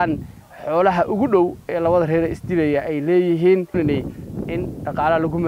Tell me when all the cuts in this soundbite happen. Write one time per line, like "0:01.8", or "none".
0:03.8